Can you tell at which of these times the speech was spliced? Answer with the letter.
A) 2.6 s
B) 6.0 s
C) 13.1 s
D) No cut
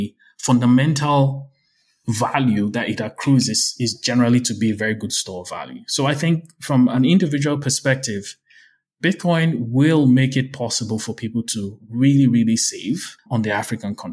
C